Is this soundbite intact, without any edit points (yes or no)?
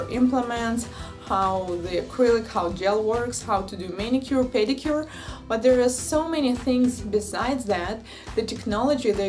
no